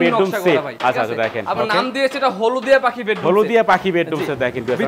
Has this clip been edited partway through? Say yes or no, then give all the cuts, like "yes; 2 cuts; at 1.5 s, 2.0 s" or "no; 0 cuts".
no; 0 cuts